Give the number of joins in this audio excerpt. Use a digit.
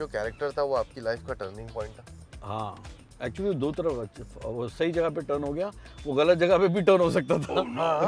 0